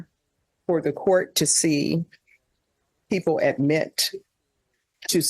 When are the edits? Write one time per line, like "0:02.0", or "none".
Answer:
none